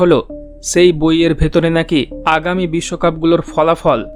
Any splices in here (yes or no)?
no